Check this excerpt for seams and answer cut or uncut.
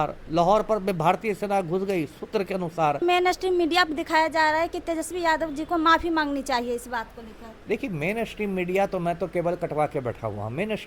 cut